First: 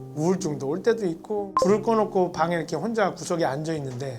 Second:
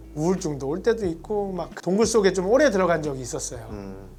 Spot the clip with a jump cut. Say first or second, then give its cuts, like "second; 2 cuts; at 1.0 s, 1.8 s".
first; 1 cut; at 1.5 s